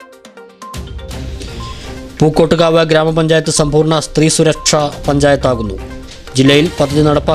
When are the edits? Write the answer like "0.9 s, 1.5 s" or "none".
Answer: 1.0 s